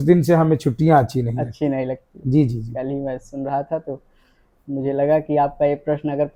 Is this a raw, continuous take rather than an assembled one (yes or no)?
yes